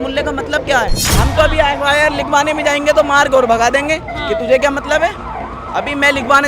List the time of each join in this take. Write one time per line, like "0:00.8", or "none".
0:01.0